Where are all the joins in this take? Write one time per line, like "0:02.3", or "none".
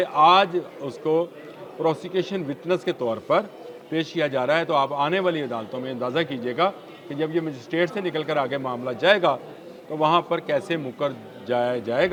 none